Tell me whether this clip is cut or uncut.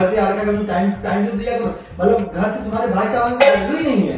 uncut